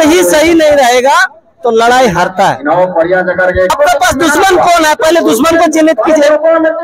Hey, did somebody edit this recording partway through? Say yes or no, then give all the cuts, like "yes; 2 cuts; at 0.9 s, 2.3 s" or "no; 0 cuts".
yes; 1 cut; at 3.7 s